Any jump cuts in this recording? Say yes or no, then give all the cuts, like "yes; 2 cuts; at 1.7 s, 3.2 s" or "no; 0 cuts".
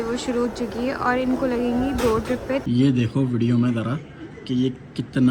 yes; 1 cut; at 2.6 s